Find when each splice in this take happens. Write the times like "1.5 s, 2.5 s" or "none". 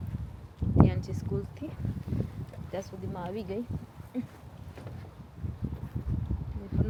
none

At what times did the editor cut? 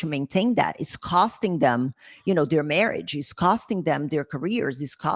none

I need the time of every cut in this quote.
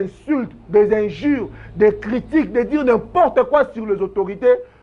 none

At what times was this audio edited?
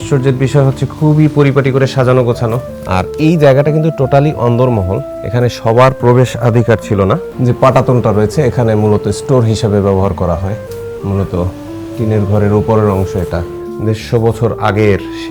2.9 s, 7.3 s, 13.6 s

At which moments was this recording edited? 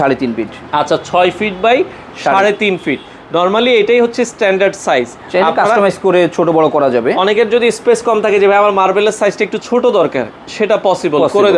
none

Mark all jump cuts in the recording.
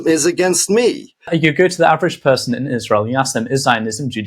1.3 s

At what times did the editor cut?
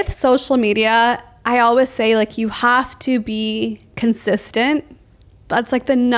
none

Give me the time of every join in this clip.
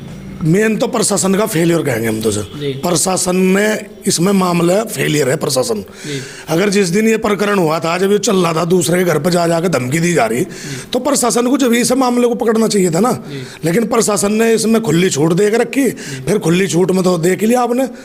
none

